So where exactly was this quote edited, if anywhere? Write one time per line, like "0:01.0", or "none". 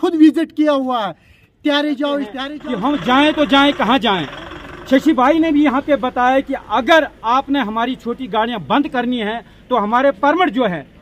0:02.5